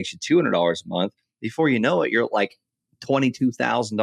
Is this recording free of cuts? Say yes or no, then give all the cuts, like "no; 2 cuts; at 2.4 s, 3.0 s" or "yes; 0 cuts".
yes; 0 cuts